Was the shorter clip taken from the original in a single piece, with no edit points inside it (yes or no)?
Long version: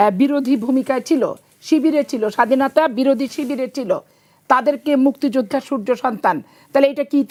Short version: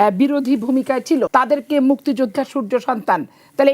no